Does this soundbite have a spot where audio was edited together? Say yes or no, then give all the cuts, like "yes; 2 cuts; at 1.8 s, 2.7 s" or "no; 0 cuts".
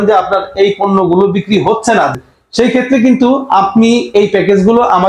yes; 1 cut; at 2.1 s